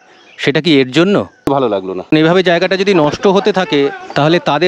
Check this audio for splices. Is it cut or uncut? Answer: cut